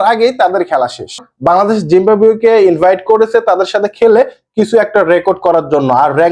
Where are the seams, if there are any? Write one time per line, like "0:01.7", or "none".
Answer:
0:01.3